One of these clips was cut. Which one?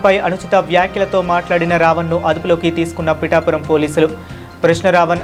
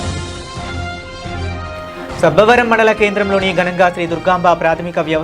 second; 1 cut; at 1.0 s

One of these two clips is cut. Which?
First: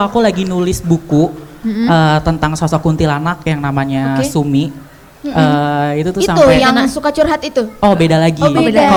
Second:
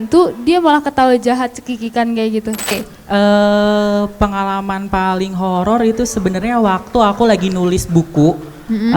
second; 1 cut; at 2.7 s

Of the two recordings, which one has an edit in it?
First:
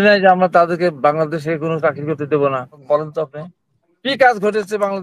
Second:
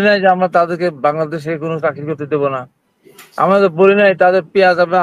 first; 1 cut; at 2.8 s

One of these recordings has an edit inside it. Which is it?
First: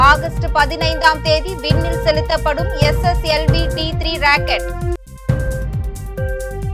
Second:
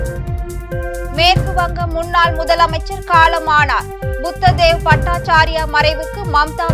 second; 1 cut; at 1.0 s

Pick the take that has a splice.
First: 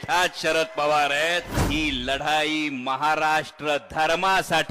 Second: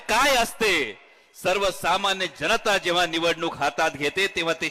first; 1 cut; at 1.5 s

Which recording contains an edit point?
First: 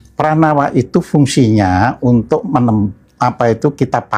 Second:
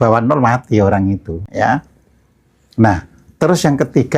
second; 1 cut; at 1.4 s

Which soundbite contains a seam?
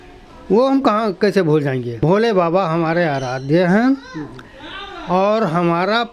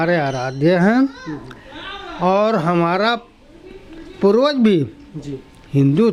first; 1 cut; at 1.9 s

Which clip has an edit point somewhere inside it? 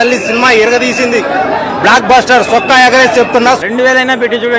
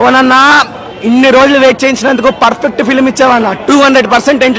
first; 1 cut; at 3.6 s

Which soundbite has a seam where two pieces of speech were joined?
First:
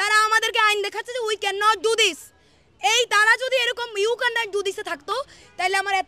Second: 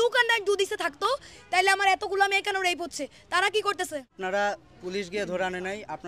second; 1 cut; at 4.1 s

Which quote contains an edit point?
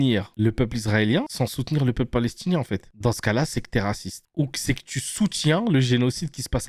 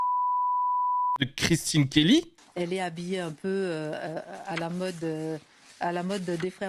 second; 2 cuts; at 1.1 s, 2.4 s

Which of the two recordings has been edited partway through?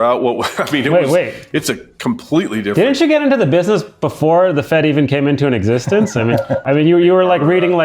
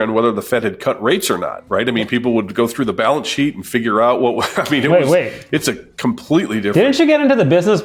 first; 1 cut; at 6.6 s

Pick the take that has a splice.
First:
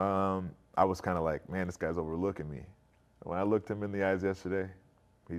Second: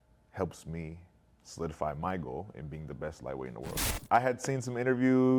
second; 1 cut; at 3.9 s

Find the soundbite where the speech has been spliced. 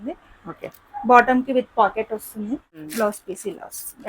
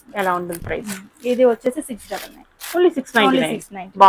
first; 1 cut; at 2.8 s

